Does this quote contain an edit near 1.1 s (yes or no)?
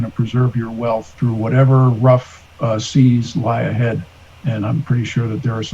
yes